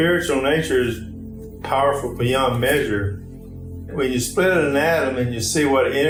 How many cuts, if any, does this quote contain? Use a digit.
0